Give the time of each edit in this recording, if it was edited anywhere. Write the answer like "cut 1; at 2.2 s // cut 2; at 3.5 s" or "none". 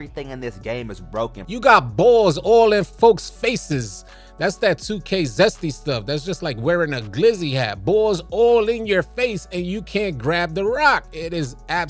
cut 1; at 1.4 s